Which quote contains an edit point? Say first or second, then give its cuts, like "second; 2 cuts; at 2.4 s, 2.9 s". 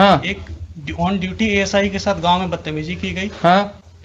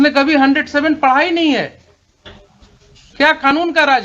second; 1 cut; at 3.0 s